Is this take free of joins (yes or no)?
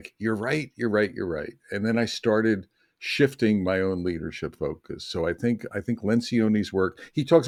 yes